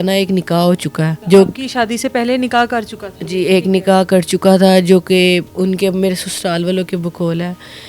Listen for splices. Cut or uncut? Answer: uncut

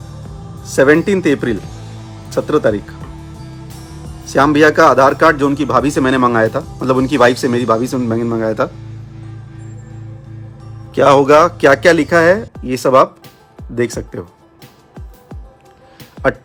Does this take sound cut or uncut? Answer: uncut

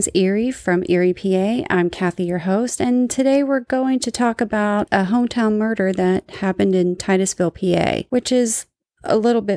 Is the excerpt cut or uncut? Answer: cut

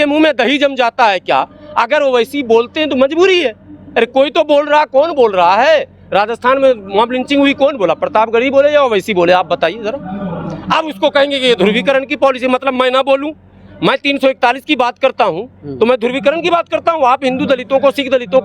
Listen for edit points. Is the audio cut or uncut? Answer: uncut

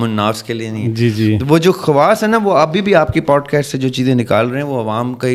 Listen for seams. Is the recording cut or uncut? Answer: uncut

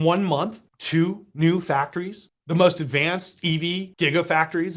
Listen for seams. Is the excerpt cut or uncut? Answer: cut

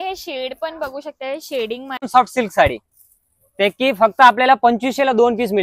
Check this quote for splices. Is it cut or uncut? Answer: cut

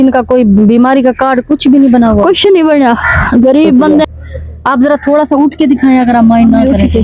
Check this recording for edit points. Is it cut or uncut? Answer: cut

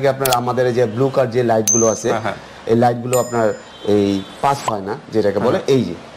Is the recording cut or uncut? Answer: uncut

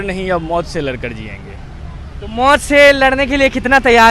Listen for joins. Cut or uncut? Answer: uncut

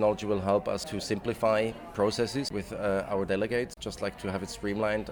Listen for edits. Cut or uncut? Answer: cut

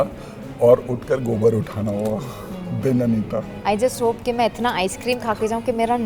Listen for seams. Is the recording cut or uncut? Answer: cut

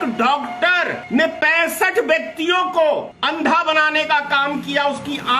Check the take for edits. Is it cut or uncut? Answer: cut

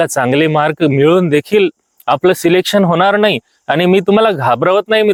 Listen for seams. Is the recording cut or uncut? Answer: uncut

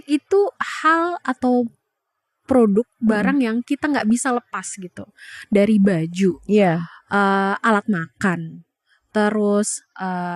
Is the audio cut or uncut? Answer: uncut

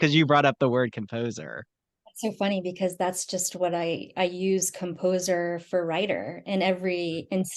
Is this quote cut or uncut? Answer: uncut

